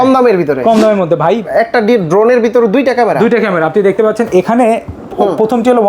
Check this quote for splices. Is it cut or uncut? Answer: cut